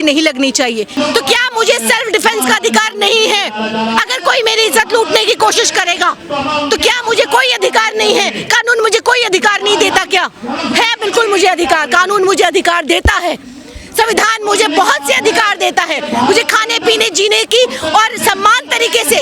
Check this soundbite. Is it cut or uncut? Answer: cut